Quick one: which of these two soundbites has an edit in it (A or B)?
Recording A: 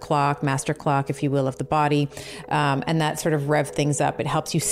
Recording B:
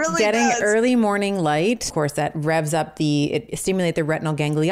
B